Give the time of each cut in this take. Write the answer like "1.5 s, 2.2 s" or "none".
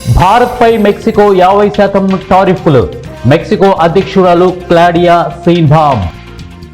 none